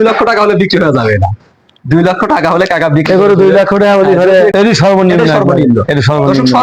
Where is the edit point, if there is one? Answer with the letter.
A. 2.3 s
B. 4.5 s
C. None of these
B